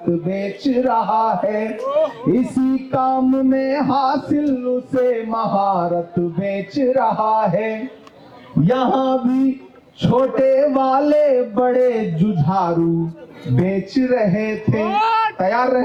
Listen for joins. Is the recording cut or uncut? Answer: uncut